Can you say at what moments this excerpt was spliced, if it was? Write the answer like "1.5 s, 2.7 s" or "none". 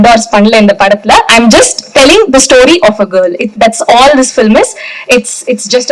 none